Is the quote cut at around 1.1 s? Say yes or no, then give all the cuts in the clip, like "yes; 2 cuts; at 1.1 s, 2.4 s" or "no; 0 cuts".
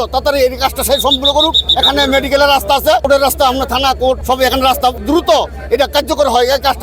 no; 3 cuts; at 3.0 s, 4.2 s, 5.0 s